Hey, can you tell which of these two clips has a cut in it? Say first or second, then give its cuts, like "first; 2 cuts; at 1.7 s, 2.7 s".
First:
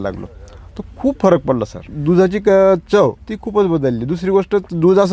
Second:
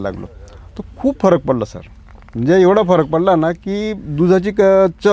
first; 2 cuts; at 1.9 s, 3.2 s